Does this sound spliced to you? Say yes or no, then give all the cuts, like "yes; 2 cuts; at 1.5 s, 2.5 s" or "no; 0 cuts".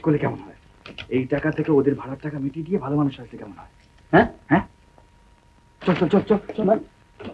no; 0 cuts